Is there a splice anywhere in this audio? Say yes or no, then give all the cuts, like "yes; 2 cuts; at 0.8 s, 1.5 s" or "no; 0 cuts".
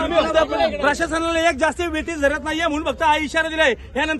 no; 0 cuts